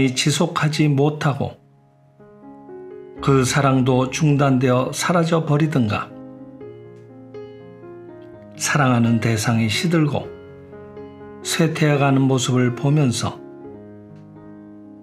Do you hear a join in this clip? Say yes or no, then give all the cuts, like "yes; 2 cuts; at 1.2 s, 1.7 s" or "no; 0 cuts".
no; 0 cuts